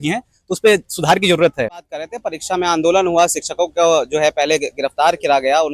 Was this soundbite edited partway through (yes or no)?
yes